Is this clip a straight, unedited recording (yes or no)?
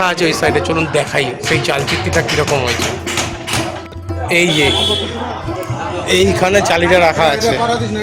yes